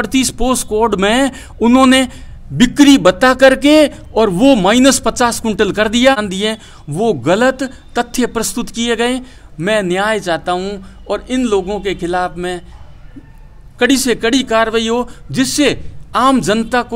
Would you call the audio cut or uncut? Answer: cut